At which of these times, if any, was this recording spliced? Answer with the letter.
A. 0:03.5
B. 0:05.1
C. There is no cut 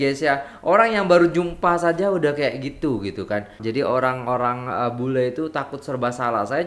A